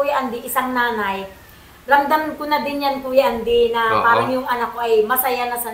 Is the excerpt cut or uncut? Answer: uncut